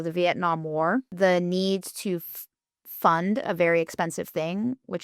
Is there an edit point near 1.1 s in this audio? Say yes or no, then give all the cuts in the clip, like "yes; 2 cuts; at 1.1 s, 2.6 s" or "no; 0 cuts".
yes; 1 cut; at 1.1 s